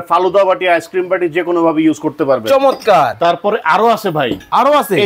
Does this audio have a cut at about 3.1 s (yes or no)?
yes